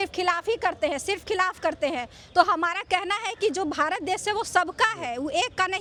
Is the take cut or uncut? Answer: uncut